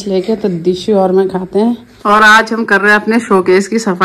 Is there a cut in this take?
yes; 1 cut; at 1.9 s

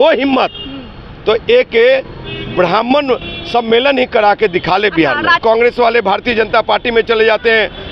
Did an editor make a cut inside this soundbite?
yes; 1 cut; at 5.4 s

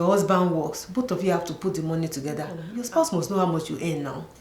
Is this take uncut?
no; 1 cut; at 2.6 s

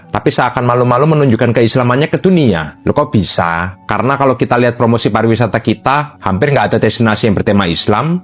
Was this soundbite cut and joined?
no; 0 cuts

